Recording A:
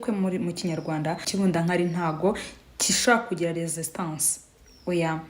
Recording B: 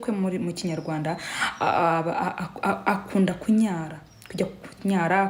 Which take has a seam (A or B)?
A